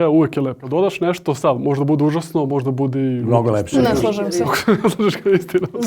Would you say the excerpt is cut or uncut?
uncut